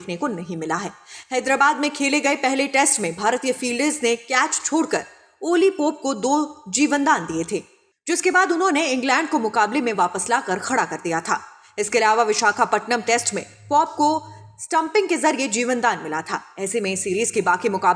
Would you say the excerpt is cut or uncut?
cut